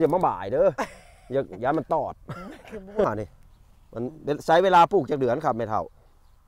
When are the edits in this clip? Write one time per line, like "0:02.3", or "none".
0:03.1